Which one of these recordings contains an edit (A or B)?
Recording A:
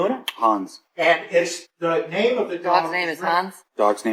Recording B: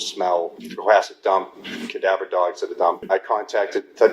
B